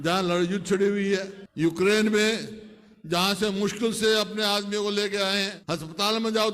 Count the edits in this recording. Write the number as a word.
two